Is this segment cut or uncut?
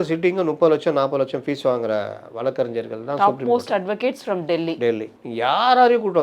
cut